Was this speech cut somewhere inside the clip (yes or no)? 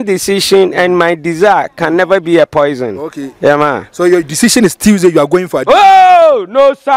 no